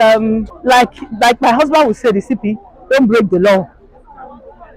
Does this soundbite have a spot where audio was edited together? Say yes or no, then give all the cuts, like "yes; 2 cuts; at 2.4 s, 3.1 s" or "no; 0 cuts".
yes; 1 cut; at 1.0 s